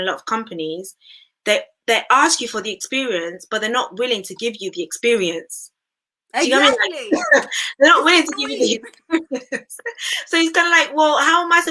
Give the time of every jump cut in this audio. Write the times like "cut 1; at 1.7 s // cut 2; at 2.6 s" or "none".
none